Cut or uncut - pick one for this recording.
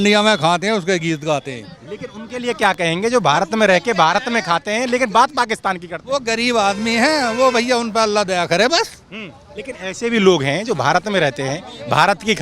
uncut